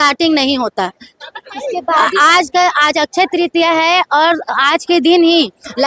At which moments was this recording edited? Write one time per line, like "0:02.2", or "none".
none